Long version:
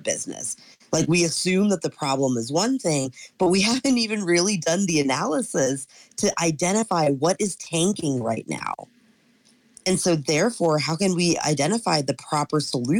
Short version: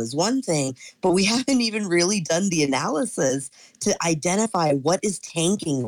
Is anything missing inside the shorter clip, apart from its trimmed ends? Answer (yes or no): no